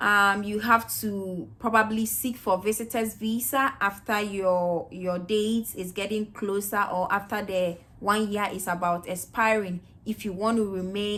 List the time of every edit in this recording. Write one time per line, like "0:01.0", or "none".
none

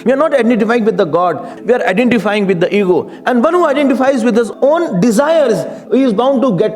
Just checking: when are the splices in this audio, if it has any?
0:01.5
0:05.8

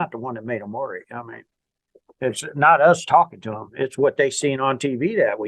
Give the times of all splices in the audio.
none

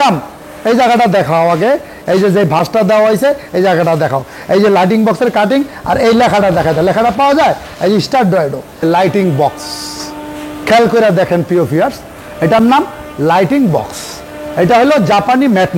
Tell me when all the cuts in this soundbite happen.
0:08.8

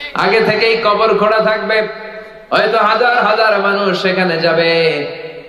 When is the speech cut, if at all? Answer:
none

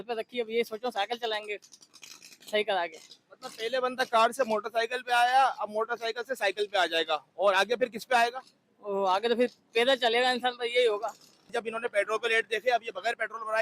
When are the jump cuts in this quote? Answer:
none

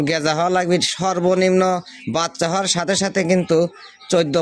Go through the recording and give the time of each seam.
none

